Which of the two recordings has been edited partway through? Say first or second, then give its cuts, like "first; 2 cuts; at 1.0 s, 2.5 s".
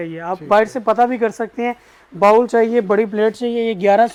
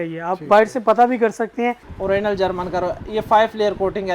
second; 1 cut; at 1.9 s